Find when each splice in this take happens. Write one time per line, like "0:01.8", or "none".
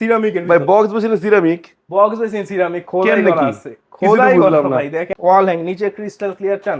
0:05.1